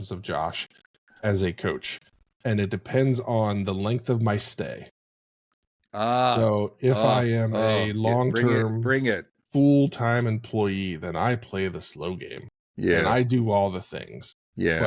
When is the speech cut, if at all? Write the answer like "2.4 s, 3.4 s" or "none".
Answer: none